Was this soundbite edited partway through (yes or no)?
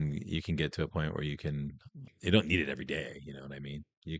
yes